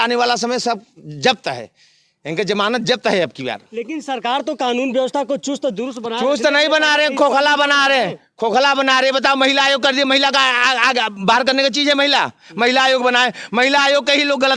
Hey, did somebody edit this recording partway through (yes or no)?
no